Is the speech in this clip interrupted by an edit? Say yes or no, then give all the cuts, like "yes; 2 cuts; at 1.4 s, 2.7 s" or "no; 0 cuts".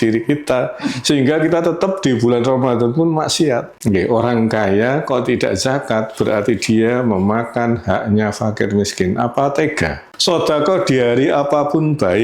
yes; 2 cuts; at 3.7 s, 10.0 s